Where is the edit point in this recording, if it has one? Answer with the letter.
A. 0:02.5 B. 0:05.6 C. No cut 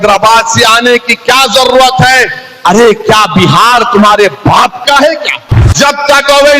B